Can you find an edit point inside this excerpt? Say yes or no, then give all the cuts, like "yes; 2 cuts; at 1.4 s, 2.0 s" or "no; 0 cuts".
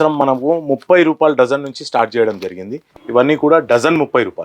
yes; 1 cut; at 2.9 s